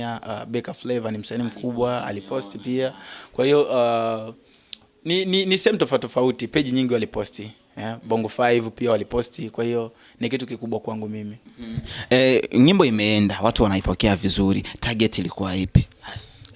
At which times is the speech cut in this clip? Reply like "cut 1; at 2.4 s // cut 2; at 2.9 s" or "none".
none